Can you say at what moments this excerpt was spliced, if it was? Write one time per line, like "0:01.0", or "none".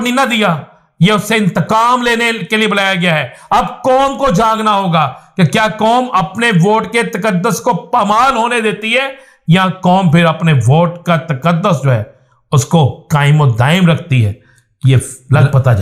none